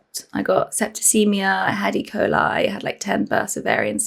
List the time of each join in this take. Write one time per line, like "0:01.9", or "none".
none